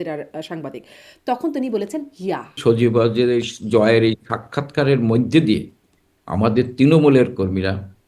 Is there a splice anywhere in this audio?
yes; 1 cut; at 2.6 s

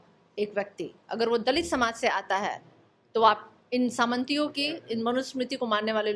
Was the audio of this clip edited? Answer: no; 0 cuts

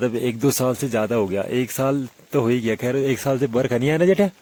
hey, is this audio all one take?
yes; 0 cuts

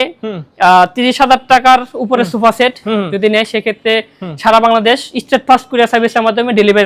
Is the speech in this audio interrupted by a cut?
no; 0 cuts

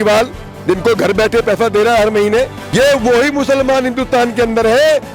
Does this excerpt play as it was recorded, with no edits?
no; 1 cut; at 2.6 s

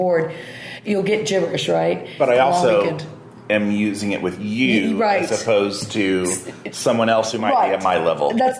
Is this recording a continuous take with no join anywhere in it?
no; 1 cut; at 2.1 s

